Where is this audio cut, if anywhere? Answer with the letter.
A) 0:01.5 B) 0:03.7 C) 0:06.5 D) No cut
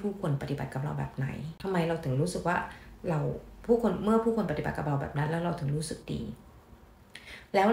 A